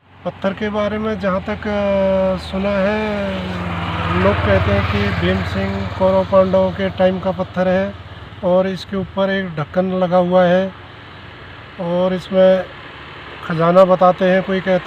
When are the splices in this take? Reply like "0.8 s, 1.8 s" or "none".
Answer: none